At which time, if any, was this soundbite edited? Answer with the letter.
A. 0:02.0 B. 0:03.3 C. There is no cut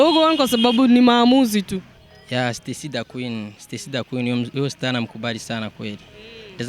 A